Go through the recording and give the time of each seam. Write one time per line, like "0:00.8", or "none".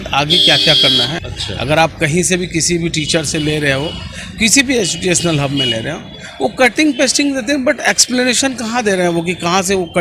0:01.1